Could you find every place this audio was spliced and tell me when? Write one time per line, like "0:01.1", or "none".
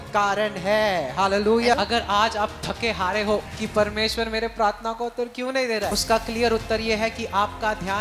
0:01.7
0:03.6
0:06.0